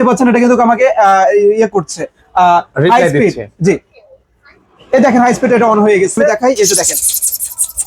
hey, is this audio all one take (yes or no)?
no